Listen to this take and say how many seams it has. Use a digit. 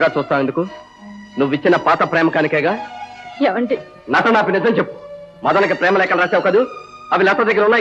0